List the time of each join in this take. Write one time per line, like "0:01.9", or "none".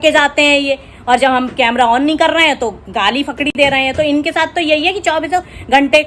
none